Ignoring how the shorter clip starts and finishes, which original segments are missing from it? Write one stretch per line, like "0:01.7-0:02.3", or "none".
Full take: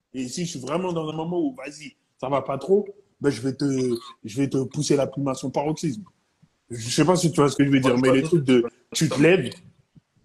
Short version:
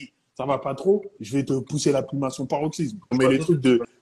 0:03.0-0:04.2
0:06.2-0:08.0